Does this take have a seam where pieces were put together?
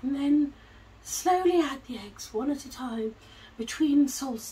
no; 0 cuts

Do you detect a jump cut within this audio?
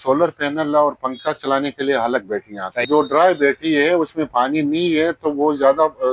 yes; 1 cut; at 2.8 s

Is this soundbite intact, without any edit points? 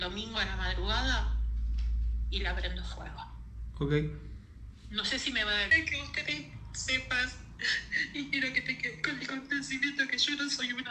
no; 1 cut; at 5.7 s

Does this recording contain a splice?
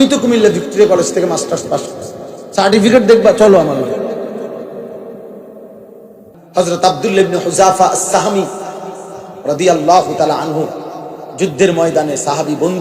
yes; 1 cut; at 6.3 s

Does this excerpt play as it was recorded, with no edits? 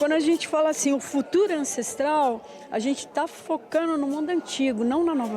yes; 0 cuts

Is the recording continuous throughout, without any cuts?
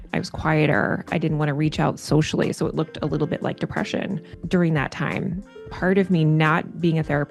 no; 2 cuts; at 4.3 s, 5.5 s

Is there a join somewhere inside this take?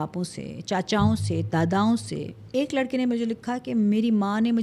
yes; 1 cut; at 2.4 s

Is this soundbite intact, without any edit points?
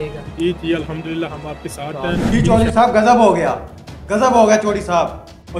no; 1 cut; at 2.2 s

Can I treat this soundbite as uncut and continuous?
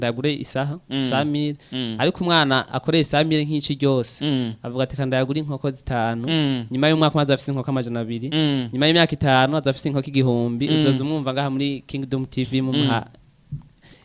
yes; 0 cuts

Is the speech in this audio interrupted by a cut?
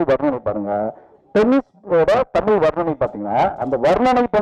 no; 0 cuts

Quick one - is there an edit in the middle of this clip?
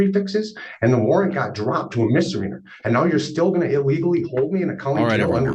no; 0 cuts

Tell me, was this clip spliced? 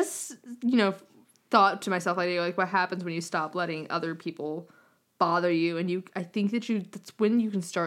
no; 0 cuts

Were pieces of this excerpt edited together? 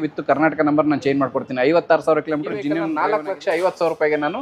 yes; 1 cut; at 2.8 s

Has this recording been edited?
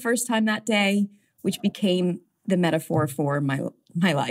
yes; 1 cut; at 2.3 s

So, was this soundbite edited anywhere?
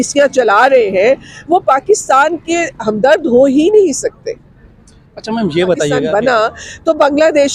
yes; 1 cut; at 6.0 s

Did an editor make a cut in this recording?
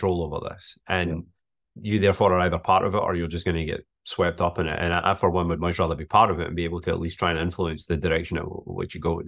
no; 0 cuts

